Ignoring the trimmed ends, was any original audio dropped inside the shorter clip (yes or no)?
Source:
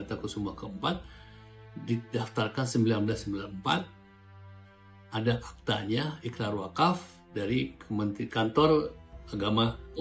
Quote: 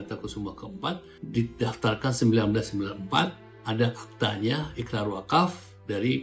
yes